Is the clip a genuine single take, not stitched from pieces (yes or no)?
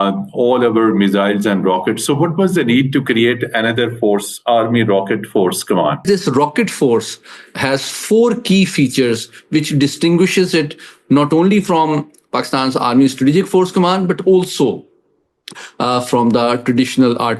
no